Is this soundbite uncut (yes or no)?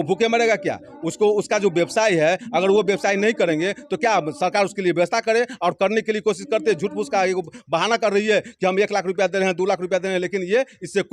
yes